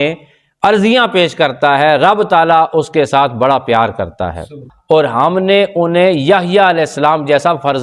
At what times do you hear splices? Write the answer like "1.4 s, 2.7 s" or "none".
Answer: 4.7 s